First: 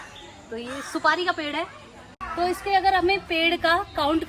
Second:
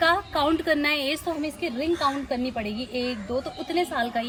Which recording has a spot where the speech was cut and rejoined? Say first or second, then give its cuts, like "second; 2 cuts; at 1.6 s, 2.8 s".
first; 1 cut; at 2.2 s